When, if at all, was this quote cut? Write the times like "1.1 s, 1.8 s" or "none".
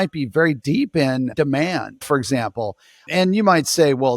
1.3 s